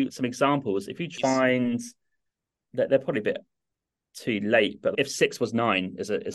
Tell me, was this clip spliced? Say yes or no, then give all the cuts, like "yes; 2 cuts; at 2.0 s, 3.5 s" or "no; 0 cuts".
yes; 1 cut; at 1.1 s